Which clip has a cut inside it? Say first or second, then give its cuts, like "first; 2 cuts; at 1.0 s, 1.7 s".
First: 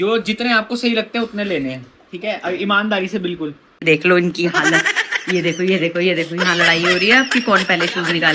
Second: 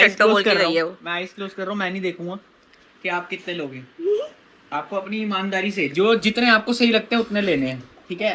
first; 1 cut; at 3.8 s